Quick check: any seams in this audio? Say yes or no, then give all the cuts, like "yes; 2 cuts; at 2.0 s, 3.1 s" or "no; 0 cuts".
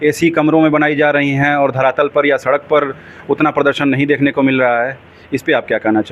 no; 0 cuts